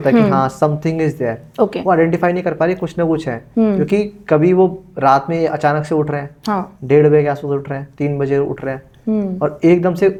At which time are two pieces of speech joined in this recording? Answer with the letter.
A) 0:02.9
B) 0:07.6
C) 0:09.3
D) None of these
D